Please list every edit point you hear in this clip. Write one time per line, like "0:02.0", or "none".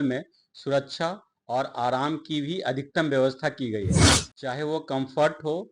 none